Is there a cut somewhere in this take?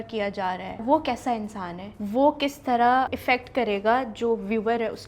yes; 3 cuts; at 0.8 s, 1.8 s, 3.1 s

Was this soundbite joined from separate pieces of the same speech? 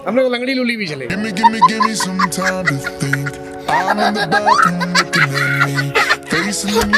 no; 0 cuts

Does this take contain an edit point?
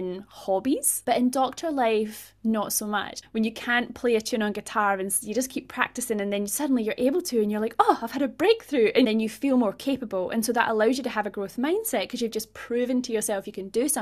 yes; 3 cuts; at 0.9 s, 3.1 s, 9.1 s

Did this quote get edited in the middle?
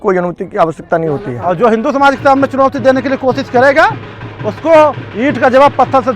yes; 1 cut; at 1.3 s

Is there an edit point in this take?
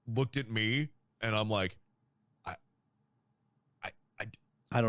yes; 1 cut; at 1.0 s

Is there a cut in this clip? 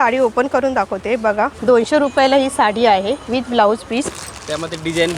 yes; 1 cut; at 1.6 s

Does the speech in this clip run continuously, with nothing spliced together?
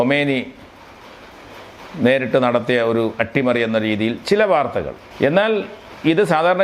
no; 1 cut; at 5.0 s

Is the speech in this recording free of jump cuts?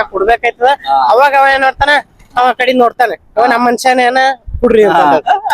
yes; 0 cuts

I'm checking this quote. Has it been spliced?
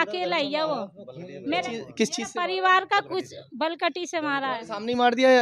no; 0 cuts

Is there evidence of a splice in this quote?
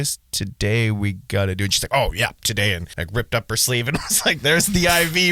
yes; 1 cut; at 2.9 s

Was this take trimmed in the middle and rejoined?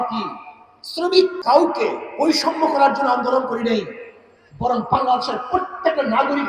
yes; 1 cut; at 1.4 s

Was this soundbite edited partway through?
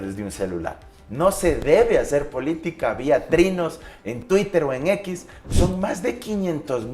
yes; 1 cut; at 5.4 s

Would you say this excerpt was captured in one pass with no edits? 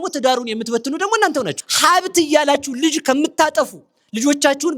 no; 1 cut; at 1.6 s

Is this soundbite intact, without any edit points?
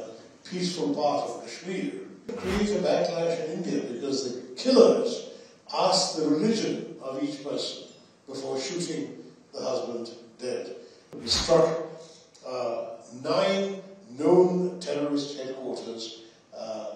no; 2 cuts; at 2.4 s, 11.1 s

